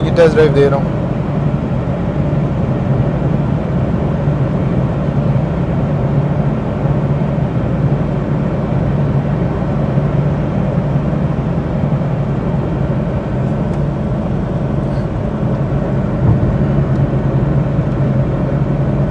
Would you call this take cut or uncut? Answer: uncut